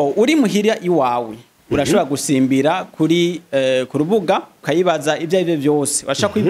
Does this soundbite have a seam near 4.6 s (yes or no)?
yes